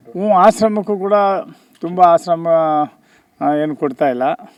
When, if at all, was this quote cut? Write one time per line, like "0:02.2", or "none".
none